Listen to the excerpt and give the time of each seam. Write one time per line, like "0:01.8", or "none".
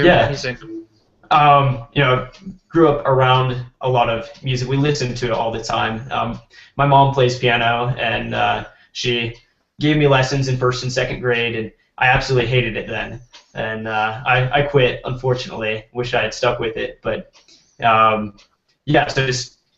none